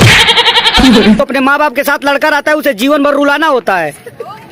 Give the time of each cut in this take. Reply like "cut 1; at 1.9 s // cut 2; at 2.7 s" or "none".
cut 1; at 1.2 s